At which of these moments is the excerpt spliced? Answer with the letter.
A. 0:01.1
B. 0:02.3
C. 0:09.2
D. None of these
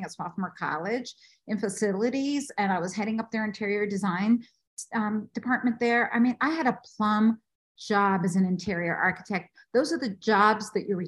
D